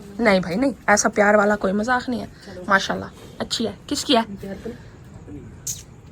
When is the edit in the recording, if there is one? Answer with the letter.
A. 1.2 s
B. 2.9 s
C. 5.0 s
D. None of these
D